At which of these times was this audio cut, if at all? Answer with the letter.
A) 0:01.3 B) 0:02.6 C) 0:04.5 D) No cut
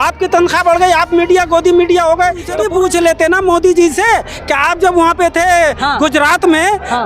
B